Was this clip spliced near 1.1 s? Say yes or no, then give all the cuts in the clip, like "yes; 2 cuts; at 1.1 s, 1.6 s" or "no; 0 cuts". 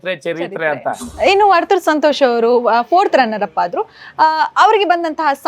yes; 1 cut; at 1.1 s